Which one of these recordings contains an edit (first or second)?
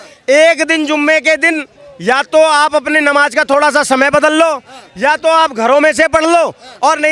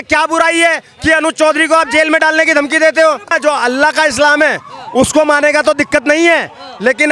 second